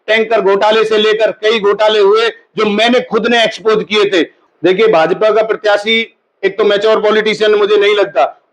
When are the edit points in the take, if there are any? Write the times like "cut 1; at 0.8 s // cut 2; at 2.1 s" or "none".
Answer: cut 1; at 4.4 s

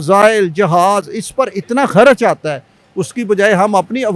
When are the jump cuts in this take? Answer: none

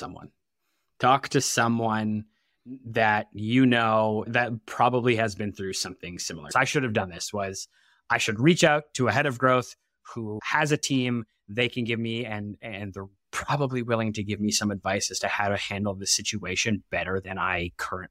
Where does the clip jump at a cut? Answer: cut 1; at 6.5 s // cut 2; at 10.4 s

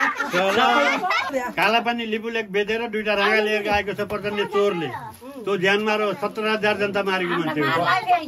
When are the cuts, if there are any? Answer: cut 1; at 1.3 s

